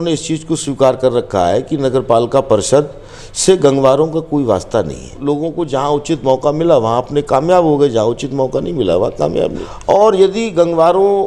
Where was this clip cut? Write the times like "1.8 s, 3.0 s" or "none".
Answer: 5.1 s, 9.6 s